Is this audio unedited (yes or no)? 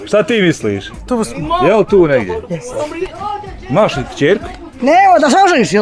no